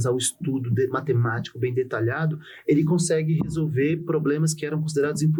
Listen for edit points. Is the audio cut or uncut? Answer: uncut